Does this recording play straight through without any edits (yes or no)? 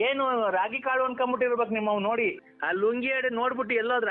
no